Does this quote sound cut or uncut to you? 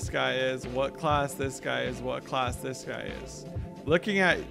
uncut